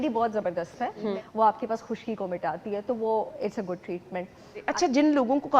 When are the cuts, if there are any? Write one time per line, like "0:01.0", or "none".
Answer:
0:01.1
0:04.7